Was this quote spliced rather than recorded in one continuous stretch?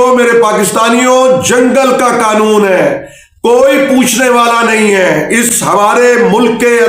no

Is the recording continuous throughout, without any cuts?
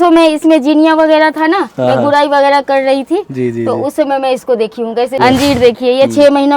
no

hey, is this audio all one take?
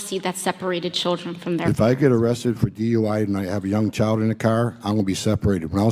yes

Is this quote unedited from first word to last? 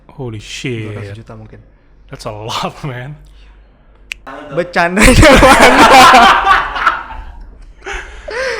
no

